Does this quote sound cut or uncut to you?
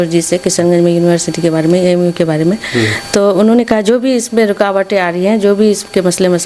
uncut